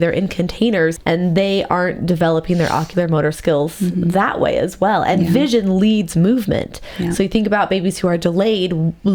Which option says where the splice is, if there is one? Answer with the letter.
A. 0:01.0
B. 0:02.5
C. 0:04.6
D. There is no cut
A